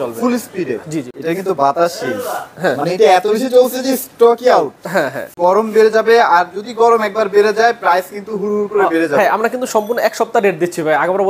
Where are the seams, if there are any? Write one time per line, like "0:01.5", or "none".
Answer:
0:01.1
0:05.2